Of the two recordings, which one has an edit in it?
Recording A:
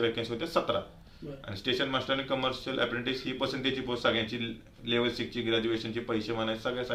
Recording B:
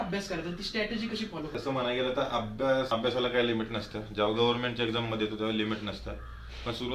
B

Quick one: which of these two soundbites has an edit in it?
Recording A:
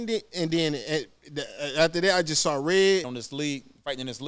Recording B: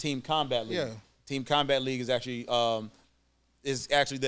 A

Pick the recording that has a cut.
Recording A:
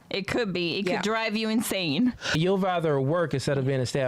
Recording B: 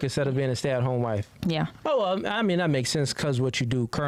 A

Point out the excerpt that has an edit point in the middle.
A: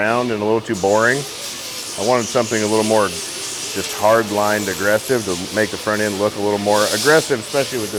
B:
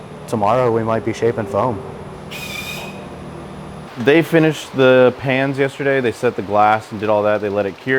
B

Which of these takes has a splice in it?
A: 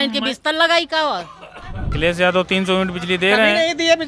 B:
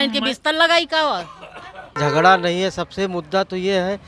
A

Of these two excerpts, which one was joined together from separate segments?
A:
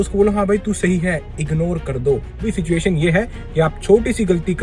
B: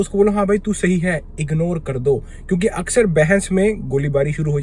A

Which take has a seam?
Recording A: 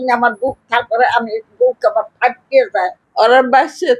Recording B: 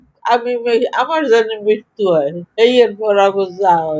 A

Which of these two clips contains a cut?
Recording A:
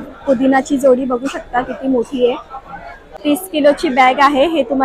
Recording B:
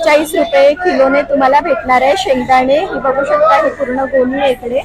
A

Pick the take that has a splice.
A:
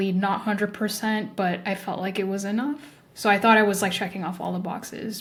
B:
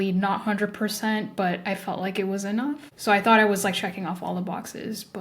B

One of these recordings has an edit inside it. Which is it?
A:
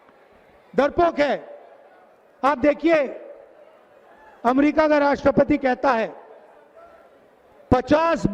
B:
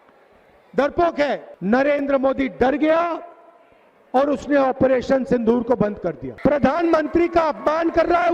B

